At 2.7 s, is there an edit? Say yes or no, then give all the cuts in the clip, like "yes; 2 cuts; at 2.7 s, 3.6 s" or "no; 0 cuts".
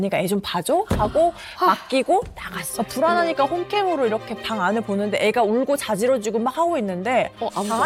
yes; 1 cut; at 2.7 s